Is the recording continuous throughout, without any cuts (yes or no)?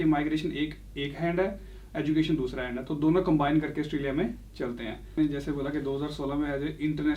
no